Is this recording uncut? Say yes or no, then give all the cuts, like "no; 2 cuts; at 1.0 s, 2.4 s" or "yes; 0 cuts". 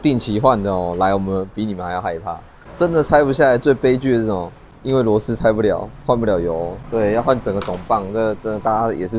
no; 3 cuts; at 2.6 s, 4.7 s, 6.8 s